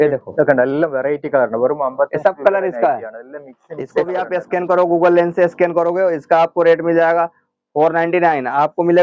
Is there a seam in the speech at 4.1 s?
yes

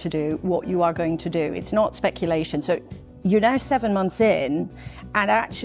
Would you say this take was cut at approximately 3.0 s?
yes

